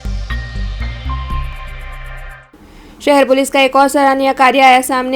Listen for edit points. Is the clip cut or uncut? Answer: cut